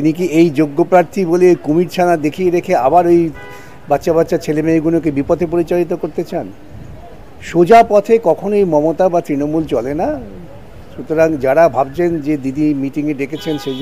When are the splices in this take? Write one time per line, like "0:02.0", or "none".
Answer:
none